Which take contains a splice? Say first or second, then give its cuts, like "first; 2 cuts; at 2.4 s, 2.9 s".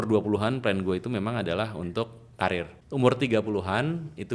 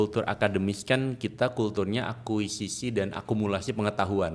first; 1 cut; at 2.8 s